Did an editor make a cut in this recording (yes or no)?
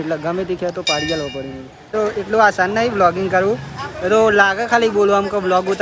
yes